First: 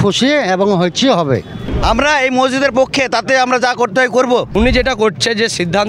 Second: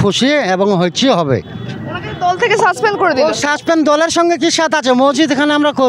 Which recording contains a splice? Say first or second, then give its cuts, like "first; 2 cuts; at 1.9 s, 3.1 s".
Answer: first; 2 cuts; at 1.7 s, 4.5 s